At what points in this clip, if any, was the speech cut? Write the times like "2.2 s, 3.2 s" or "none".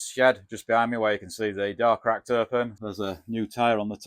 2.8 s